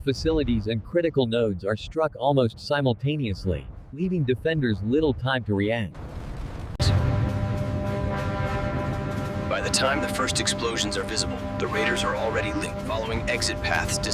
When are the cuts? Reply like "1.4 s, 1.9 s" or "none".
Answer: none